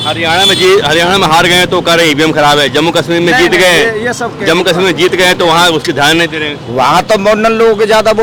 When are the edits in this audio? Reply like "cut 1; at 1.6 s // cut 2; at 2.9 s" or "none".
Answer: none